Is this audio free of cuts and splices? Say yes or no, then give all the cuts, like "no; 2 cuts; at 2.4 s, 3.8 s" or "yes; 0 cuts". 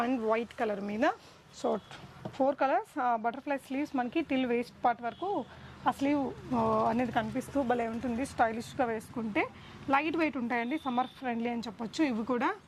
yes; 0 cuts